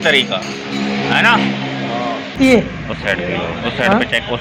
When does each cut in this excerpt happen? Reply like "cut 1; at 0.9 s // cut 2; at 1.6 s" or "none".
cut 1; at 1.9 s